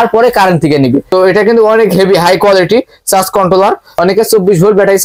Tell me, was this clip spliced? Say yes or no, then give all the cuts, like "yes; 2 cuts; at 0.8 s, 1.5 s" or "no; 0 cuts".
yes; 2 cuts; at 1.1 s, 3.9 s